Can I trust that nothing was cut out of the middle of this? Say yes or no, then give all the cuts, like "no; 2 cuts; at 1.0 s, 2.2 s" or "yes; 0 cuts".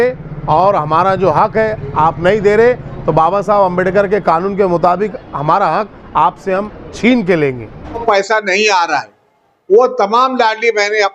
no; 1 cut; at 8.0 s